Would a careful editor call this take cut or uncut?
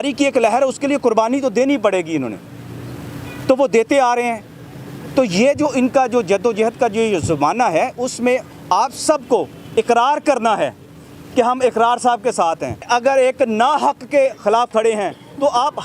cut